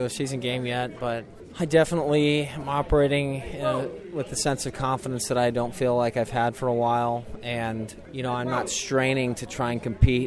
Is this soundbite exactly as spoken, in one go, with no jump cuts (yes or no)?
no